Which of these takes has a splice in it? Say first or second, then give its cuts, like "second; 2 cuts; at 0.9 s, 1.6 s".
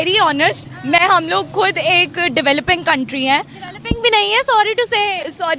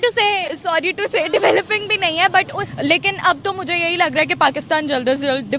second; 1 cut; at 2.6 s